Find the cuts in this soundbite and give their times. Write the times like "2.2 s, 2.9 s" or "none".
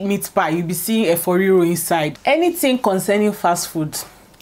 2.1 s